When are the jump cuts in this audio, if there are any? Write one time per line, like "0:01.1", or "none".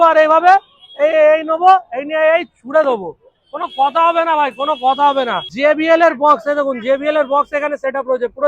0:05.4

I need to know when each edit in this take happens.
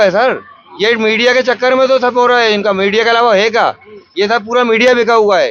none

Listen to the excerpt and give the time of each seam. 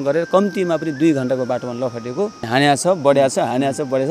0:02.5

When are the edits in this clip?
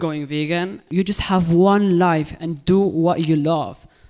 0:00.9

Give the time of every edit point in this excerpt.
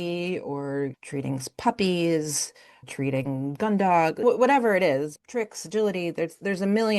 0:01.0
0:02.9
0:04.2
0:05.2

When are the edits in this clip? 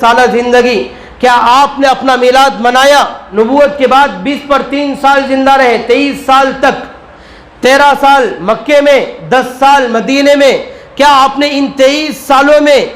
0:03.2

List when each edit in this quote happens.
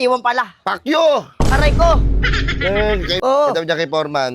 0:03.1

